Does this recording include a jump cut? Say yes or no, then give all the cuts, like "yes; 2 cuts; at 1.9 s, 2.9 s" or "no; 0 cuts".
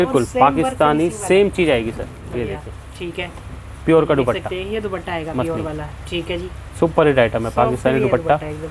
no; 0 cuts